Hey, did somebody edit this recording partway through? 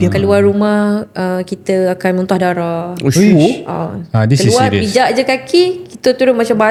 no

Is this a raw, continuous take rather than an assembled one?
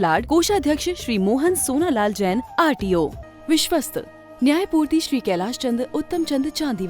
no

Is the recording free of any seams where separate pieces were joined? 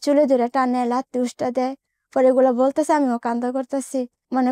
yes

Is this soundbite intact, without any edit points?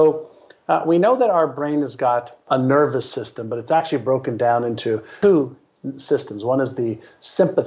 no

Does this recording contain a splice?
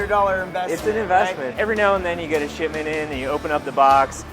yes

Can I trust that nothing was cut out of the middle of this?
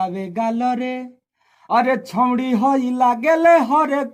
yes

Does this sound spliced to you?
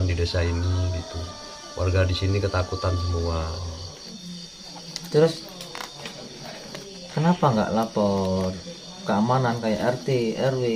yes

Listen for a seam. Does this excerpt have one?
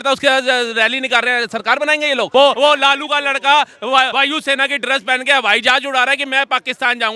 yes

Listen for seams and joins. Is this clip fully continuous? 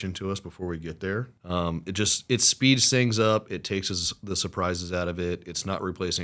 no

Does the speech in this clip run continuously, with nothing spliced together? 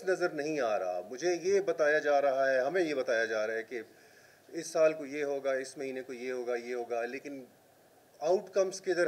yes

